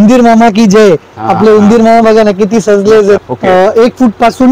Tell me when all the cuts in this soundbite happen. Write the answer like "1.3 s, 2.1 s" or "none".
3.2 s